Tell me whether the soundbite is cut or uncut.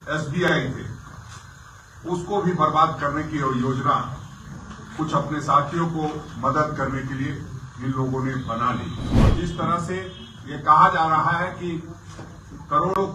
cut